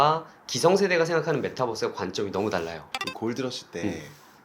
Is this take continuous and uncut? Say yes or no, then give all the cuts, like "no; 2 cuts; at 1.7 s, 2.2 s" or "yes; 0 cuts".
no; 1 cut; at 2.8 s